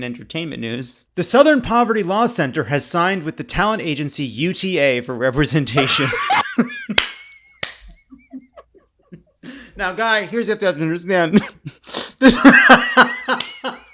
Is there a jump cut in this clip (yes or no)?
yes